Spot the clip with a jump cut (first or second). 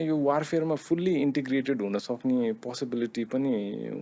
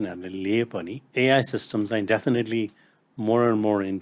second